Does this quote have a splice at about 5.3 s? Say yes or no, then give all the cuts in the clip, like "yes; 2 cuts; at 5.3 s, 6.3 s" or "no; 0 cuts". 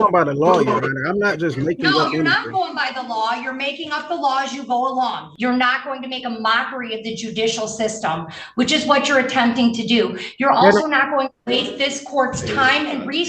yes; 1 cut; at 5.3 s